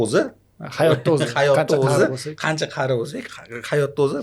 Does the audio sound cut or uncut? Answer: uncut